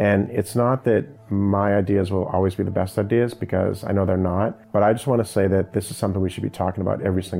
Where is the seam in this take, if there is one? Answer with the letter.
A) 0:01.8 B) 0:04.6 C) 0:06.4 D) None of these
B